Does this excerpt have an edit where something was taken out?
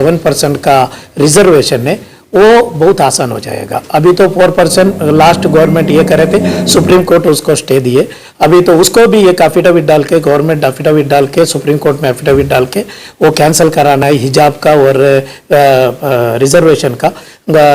no; 0 cuts

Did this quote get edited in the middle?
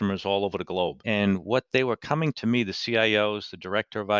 yes; 1 cut; at 1.0 s

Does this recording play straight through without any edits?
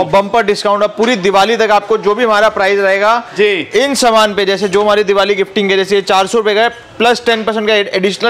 yes; 0 cuts

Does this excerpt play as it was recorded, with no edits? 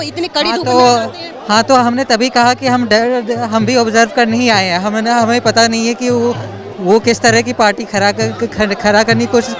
yes; 0 cuts

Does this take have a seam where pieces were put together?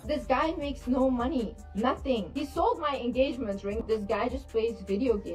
no; 0 cuts

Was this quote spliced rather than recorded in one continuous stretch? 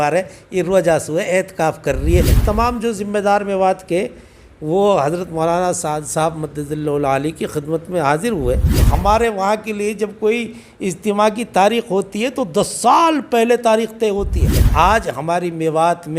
yes; 3 cuts; at 2.4 s, 8.9 s, 14.6 s

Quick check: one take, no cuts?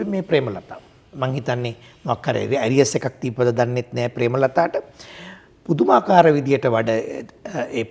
yes; 0 cuts

